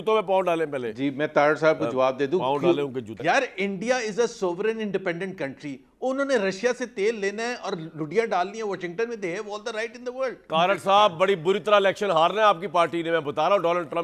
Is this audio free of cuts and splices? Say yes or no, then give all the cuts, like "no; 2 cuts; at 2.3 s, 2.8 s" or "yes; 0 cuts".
no; 2 cuts; at 3.1 s, 10.4 s